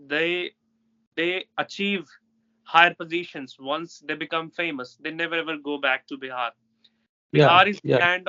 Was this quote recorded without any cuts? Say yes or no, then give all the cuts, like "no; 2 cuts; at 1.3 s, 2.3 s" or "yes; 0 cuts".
yes; 0 cuts